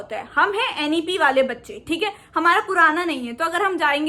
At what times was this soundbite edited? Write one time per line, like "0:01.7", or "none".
none

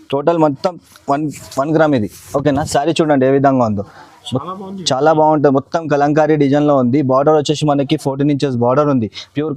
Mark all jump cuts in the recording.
none

